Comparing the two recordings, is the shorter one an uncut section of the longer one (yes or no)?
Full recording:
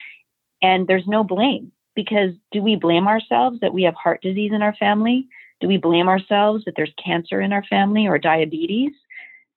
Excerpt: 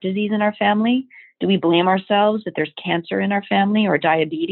yes